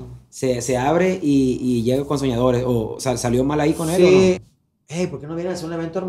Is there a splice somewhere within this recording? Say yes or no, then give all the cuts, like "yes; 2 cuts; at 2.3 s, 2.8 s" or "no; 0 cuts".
yes; 1 cut; at 4.5 s